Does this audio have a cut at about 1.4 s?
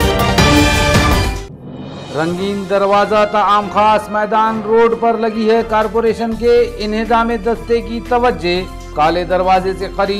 yes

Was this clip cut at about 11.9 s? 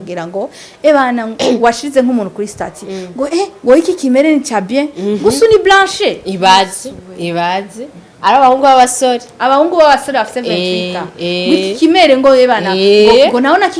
no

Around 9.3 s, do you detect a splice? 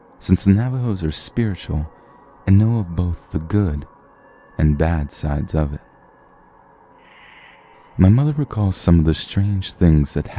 yes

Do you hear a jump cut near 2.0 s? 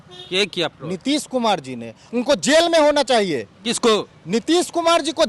yes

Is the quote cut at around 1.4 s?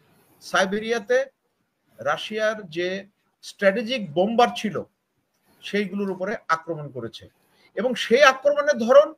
no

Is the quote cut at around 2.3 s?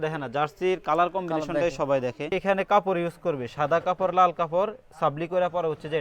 yes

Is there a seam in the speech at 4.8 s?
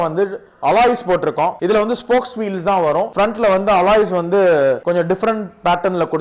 yes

